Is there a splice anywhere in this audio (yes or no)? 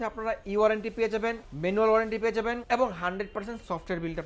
yes